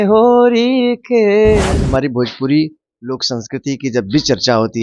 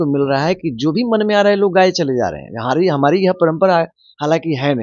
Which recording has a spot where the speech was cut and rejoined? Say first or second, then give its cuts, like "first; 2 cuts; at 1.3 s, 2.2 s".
first; 1 cut; at 1.8 s